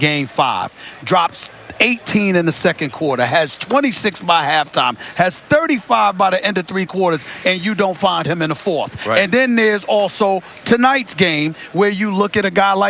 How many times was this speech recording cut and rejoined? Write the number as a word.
one